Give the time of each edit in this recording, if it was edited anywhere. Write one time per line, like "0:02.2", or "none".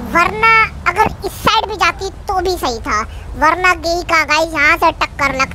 none